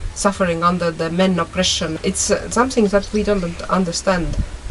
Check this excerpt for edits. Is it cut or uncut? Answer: cut